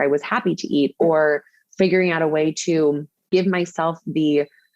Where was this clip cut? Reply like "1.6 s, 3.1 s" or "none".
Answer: 3.3 s